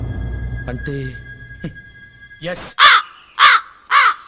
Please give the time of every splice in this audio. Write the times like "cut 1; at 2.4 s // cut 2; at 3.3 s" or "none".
cut 1; at 2.7 s